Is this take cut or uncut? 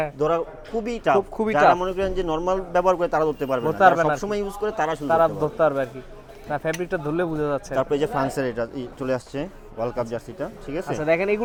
uncut